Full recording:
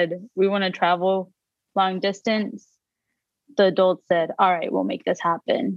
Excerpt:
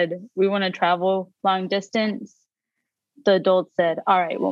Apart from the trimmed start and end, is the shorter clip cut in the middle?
yes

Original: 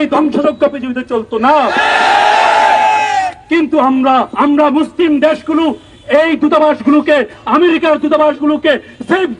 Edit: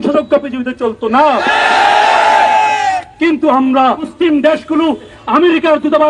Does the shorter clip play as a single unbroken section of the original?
no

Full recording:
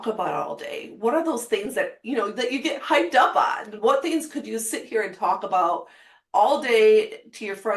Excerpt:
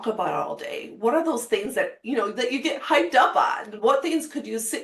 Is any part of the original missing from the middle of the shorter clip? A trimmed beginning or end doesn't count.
no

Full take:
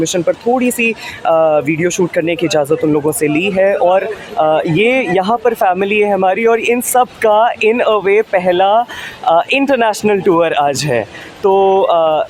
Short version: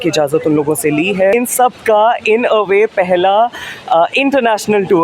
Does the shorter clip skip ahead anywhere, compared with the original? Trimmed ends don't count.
yes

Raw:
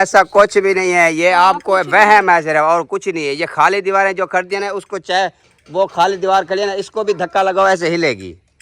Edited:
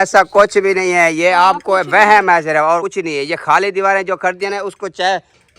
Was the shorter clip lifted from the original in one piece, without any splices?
no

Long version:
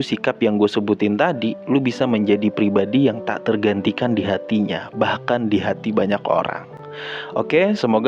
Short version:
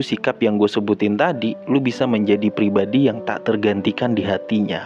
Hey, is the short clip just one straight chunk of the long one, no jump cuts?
yes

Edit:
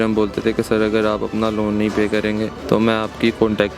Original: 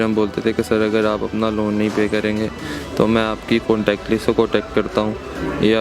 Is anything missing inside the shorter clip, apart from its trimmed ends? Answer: yes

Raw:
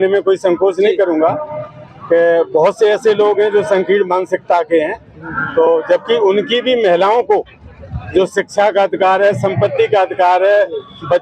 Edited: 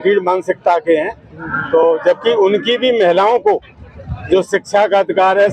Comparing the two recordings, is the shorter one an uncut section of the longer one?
yes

